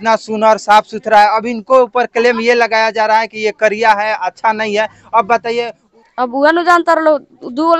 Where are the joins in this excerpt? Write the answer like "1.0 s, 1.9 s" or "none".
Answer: 5.8 s